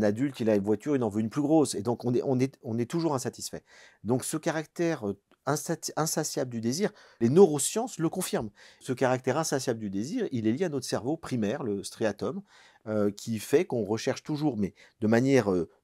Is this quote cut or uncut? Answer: cut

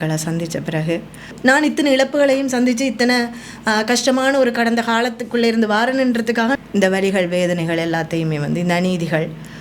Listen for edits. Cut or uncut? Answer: cut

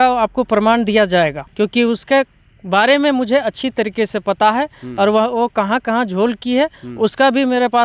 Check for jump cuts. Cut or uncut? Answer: cut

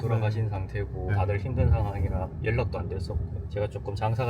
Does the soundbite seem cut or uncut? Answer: cut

